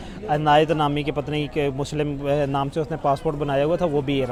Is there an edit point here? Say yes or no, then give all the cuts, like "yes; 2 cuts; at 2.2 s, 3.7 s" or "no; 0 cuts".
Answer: no; 0 cuts